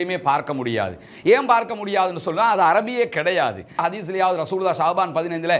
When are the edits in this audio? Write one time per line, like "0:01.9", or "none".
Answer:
0:03.8

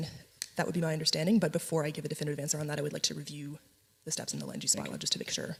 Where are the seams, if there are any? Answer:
none

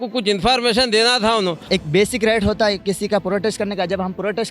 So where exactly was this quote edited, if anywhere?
0:01.6

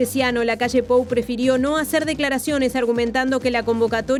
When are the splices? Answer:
none

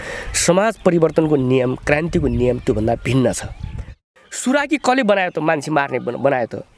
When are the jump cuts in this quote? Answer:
0:03.9

